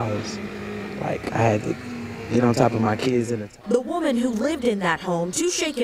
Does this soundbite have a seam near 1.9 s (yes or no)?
no